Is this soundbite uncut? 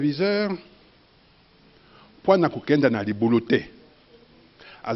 yes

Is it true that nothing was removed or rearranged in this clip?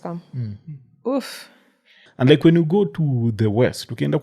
no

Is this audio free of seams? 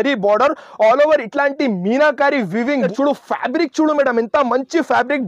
no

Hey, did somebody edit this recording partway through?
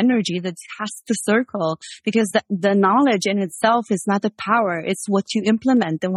no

